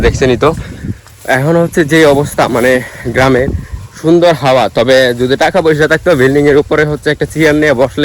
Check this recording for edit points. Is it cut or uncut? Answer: uncut